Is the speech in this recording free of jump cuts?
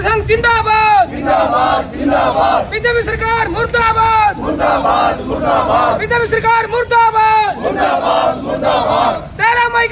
yes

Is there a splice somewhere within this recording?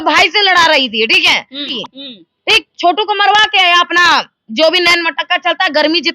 yes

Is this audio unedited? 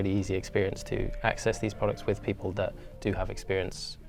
yes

